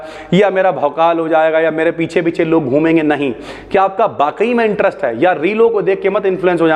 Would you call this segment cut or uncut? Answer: uncut